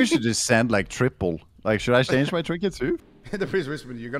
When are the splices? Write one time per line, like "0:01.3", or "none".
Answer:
0:03.0